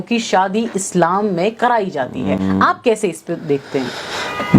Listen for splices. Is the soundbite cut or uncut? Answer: uncut